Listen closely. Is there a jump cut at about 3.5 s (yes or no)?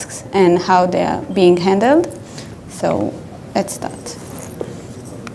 no